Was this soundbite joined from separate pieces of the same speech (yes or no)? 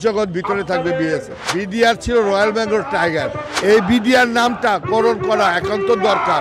yes